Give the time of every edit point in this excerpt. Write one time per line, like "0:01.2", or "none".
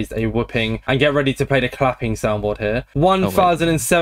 none